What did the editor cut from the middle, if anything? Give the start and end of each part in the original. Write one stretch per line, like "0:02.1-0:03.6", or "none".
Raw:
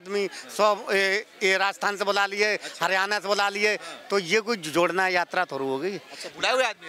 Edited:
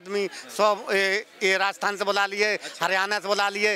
none